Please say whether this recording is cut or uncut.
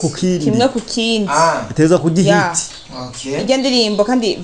uncut